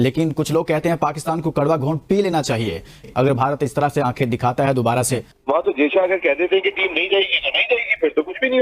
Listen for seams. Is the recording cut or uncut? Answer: cut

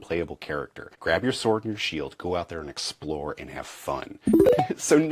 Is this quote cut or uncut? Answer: cut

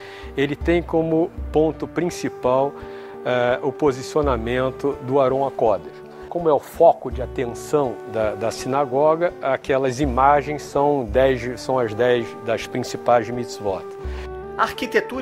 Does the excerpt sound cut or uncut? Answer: uncut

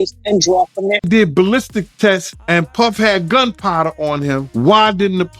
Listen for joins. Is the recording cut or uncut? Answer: cut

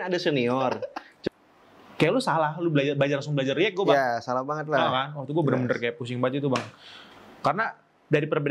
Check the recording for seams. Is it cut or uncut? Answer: cut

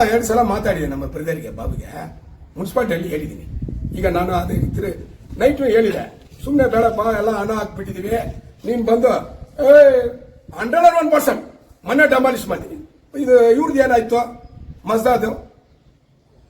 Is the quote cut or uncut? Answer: uncut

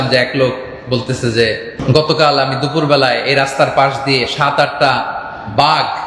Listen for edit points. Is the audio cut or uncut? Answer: cut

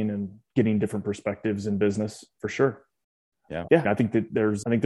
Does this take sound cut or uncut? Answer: uncut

